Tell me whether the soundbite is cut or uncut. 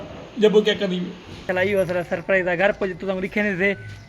cut